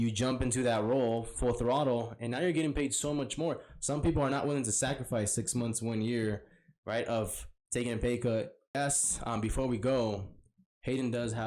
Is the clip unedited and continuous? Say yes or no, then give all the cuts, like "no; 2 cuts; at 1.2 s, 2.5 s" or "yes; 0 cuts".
no; 1 cut; at 8.8 s